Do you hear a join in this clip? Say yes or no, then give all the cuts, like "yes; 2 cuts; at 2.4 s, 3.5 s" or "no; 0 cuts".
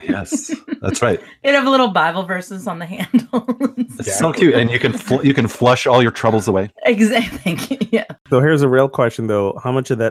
yes; 1 cut; at 8.1 s